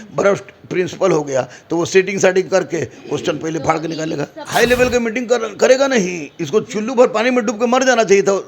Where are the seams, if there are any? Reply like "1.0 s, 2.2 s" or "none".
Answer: 4.4 s